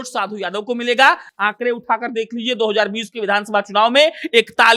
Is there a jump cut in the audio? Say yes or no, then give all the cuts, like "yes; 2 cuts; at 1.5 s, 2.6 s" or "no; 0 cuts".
no; 0 cuts